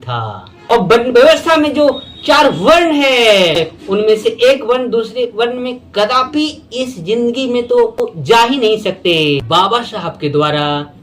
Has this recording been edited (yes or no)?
yes